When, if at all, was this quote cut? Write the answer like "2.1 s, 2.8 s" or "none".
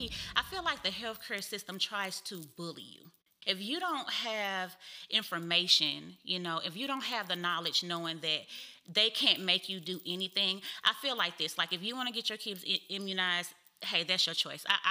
3.3 s